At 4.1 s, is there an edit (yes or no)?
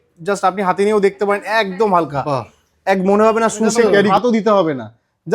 yes